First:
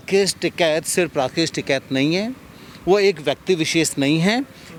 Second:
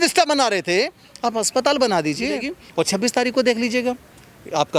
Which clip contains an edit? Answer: second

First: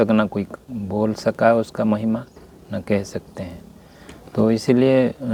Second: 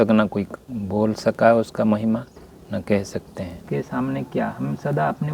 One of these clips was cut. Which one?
second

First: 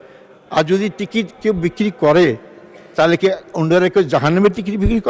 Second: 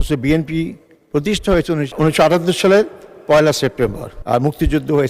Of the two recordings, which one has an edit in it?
second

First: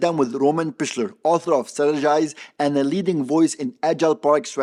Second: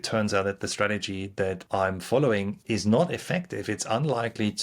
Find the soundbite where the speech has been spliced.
second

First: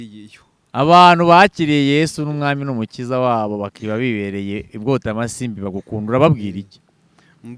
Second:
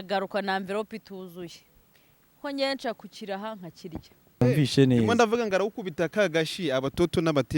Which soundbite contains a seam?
second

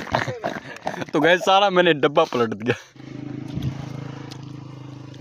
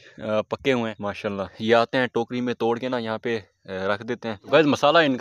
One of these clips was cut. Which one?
second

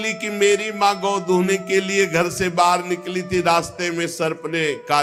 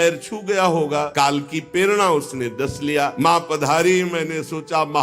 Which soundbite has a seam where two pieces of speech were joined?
second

